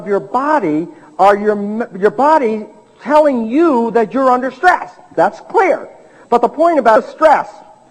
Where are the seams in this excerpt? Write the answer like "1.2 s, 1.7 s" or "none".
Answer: none